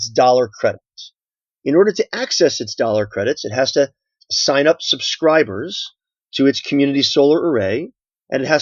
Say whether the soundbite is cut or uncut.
cut